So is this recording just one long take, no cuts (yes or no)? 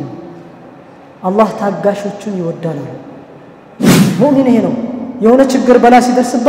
no